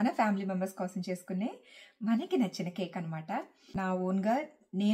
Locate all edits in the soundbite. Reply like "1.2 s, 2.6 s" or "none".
3.7 s